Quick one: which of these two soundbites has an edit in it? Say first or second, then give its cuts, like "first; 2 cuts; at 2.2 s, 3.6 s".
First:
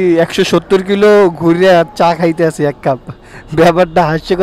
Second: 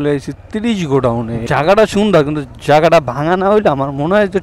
second; 1 cut; at 1.4 s